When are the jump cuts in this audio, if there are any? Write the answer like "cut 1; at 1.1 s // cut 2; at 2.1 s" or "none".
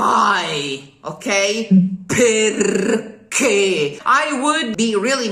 cut 1; at 4.2 s